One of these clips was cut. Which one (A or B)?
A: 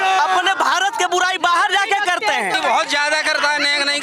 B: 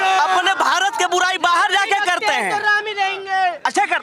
A